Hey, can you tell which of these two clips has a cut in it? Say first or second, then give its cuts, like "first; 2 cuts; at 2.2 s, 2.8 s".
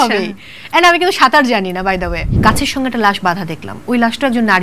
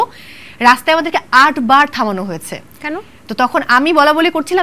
first; 1 cut; at 2.4 s